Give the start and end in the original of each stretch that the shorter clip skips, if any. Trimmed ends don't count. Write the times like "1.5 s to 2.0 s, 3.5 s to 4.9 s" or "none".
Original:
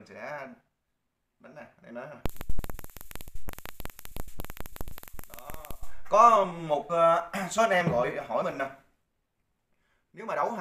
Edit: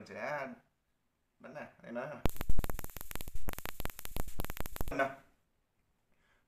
4.9 s to 8.5 s